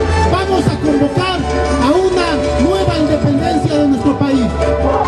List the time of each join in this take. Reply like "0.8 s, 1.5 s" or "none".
none